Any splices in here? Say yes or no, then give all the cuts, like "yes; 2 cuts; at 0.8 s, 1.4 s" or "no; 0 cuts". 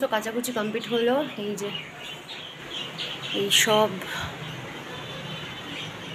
no; 0 cuts